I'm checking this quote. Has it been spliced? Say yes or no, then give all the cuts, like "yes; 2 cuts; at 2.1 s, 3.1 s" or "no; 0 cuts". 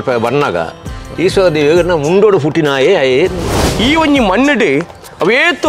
yes; 1 cut; at 3.6 s